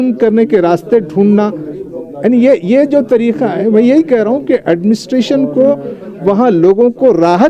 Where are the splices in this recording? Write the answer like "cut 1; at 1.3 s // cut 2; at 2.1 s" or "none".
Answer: none